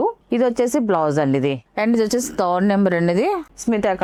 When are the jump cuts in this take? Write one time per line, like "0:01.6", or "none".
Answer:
none